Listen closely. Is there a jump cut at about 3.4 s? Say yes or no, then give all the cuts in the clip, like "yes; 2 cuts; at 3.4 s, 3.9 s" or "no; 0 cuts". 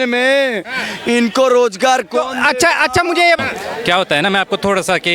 yes; 1 cut; at 3.4 s